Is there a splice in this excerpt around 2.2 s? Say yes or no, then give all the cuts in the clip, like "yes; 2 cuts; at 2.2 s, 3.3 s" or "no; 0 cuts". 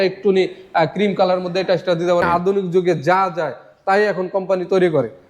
yes; 1 cut; at 2.2 s